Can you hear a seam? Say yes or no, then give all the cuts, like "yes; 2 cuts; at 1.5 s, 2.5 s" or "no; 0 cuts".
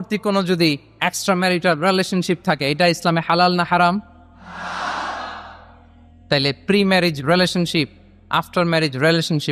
no; 0 cuts